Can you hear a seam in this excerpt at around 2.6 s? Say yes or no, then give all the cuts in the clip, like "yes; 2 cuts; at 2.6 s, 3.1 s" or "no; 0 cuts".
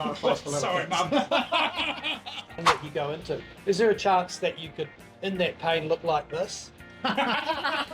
yes; 1 cut; at 2.6 s